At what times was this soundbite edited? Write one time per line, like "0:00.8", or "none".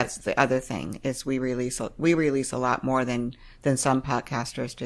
none